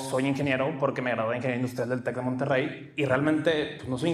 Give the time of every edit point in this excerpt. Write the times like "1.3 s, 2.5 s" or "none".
2.8 s